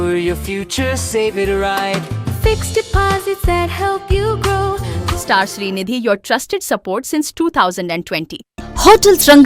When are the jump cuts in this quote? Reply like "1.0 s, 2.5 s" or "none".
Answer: 5.0 s, 8.5 s